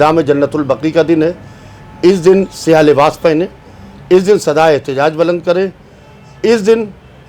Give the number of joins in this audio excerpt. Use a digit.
0